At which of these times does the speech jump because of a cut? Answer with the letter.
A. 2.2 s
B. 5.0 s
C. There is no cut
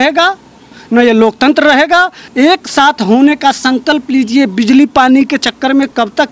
A